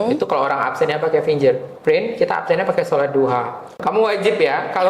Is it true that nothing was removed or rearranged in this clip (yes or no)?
no